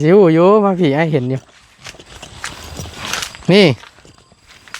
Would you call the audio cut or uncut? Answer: cut